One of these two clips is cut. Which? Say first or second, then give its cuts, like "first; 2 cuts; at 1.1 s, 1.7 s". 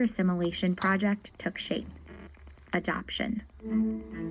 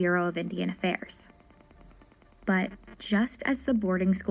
first; 1 cut; at 1.2 s